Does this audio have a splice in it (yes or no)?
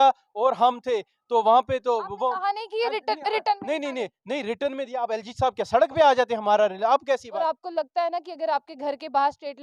yes